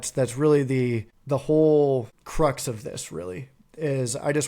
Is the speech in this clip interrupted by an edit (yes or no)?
yes